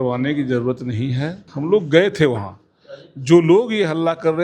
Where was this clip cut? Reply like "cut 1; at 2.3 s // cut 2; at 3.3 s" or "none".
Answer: cut 1; at 1.5 s